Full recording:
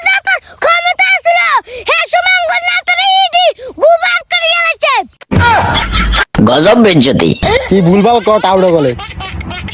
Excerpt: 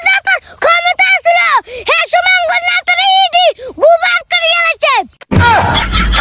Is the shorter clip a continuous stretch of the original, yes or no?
yes